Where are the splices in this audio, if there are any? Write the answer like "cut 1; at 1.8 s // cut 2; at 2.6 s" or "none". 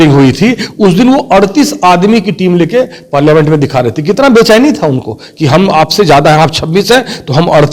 none